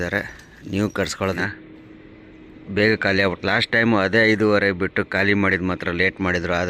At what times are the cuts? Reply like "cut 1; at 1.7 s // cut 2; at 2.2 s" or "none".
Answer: cut 1; at 1.4 s

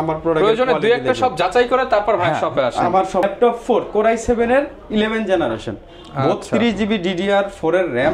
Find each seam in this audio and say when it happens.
cut 1; at 3.2 s

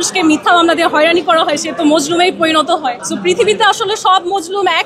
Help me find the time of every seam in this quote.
cut 1; at 3.1 s

